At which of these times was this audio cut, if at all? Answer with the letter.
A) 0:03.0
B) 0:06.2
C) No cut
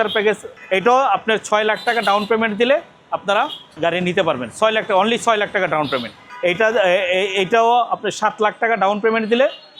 B